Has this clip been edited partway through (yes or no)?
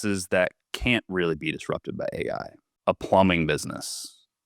yes